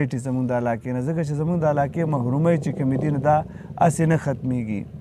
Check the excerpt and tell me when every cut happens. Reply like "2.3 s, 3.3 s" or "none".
none